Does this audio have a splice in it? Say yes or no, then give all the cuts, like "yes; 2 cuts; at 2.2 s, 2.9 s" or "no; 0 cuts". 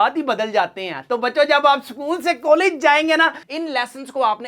yes; 1 cut; at 3.4 s